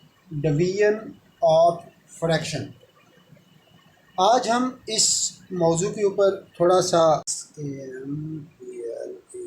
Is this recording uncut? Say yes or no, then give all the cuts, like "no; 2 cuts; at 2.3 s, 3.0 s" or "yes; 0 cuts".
no; 1 cut; at 7.3 s